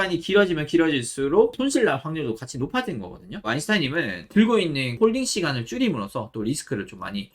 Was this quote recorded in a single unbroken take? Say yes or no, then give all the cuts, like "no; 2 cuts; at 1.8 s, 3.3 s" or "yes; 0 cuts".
no; 2 cuts; at 3.4 s, 4.9 s